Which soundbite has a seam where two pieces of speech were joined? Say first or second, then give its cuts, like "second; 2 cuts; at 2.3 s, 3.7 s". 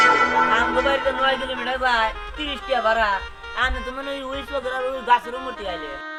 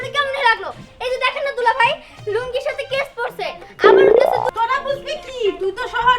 second; 1 cut; at 4.5 s